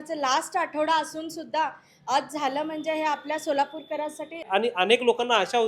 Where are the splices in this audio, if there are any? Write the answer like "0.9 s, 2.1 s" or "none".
4.5 s